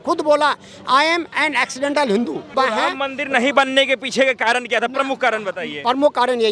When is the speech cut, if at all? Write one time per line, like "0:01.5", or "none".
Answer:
0:02.5